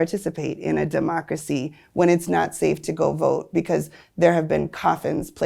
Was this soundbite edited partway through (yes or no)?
no